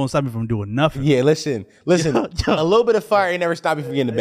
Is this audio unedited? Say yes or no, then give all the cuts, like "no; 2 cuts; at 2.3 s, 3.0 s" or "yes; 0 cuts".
yes; 0 cuts